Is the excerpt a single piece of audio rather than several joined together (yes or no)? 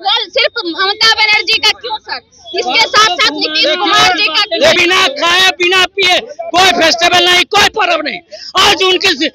no